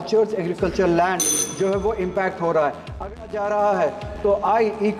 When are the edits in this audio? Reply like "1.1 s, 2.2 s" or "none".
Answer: 3.3 s